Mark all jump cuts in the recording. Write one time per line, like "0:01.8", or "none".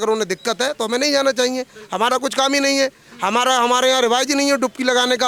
none